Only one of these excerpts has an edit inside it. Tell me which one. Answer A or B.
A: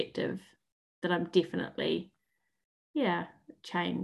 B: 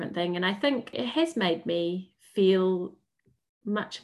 B